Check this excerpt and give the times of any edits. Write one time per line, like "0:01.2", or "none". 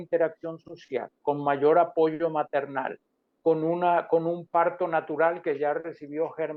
none